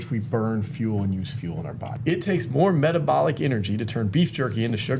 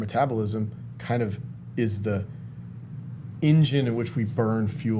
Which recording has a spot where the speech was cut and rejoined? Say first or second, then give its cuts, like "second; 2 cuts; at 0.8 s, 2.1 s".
first; 1 cut; at 1.9 s